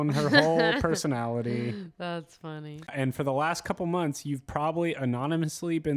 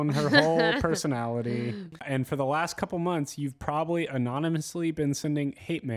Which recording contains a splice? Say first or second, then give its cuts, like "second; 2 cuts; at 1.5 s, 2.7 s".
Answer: second; 1 cut; at 1.9 s